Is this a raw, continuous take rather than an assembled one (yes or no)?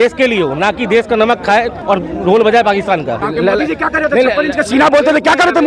no